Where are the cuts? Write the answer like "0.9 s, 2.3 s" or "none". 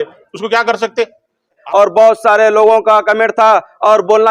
1.6 s